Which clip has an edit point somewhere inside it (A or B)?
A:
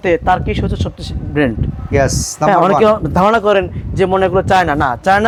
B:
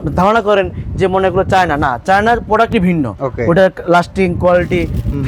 B